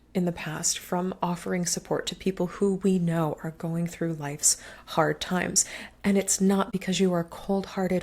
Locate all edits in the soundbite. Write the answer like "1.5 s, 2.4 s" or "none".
6.7 s